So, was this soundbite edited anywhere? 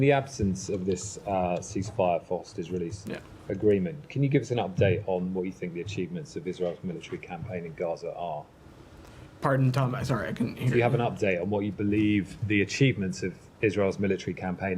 no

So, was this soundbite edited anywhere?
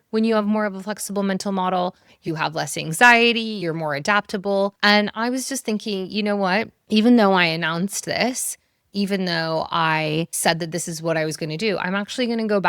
yes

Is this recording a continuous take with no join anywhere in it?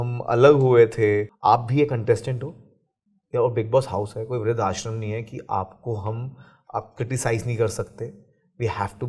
no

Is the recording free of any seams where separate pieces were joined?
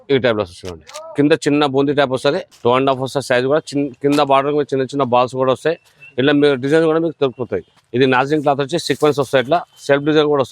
no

